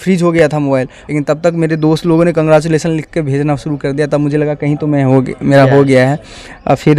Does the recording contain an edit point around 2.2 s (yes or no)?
no